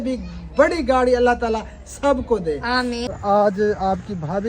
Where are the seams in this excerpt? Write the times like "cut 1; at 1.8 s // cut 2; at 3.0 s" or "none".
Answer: cut 1; at 3.1 s